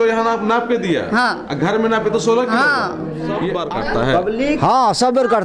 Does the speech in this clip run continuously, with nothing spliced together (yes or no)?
no